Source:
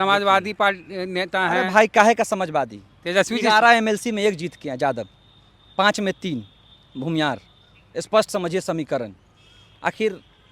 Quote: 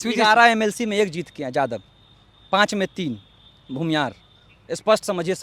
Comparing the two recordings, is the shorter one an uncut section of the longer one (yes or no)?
yes